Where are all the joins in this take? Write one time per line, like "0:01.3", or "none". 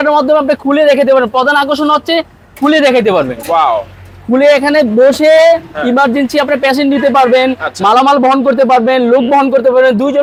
none